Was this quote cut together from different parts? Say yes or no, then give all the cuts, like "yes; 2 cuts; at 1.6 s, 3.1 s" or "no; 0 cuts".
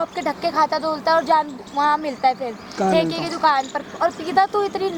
no; 0 cuts